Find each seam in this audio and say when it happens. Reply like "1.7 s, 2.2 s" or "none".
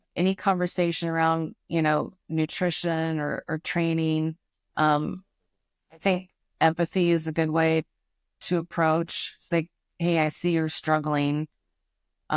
none

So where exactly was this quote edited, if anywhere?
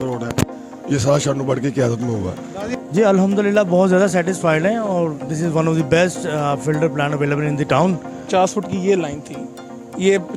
2.6 s, 8.2 s

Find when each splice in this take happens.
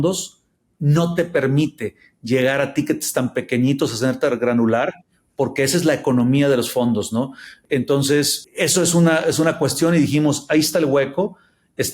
7.6 s

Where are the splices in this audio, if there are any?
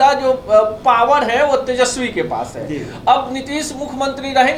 none

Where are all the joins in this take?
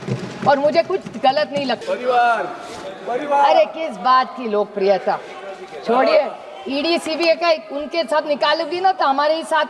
1.8 s

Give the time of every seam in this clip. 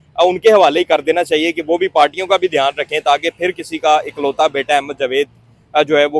none

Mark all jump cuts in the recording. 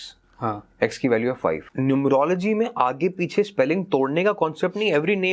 1.7 s

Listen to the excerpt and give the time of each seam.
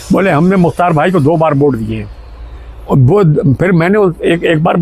none

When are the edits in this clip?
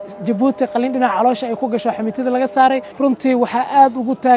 2.9 s

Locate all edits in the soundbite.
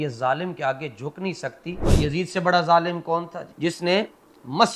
1.8 s

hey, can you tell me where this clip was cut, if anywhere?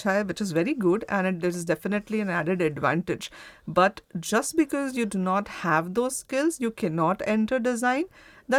none

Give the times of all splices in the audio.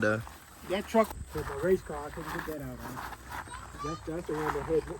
1.1 s

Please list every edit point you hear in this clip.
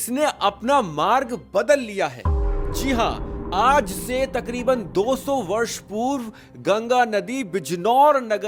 none

